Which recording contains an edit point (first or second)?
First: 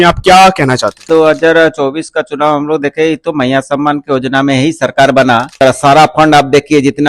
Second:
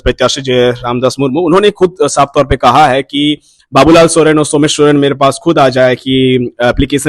first